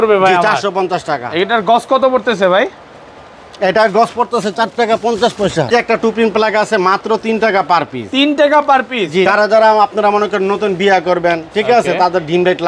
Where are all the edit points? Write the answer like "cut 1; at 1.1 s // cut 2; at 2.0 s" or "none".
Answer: cut 1; at 5.7 s // cut 2; at 9.3 s